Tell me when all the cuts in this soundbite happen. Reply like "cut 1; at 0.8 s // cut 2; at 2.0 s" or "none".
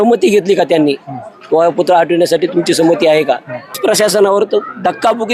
cut 1; at 3.8 s